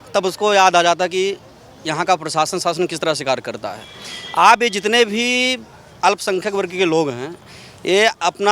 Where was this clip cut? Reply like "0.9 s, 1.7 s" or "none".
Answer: none